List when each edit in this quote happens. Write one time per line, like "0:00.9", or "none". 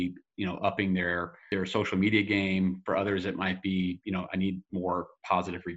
0:01.4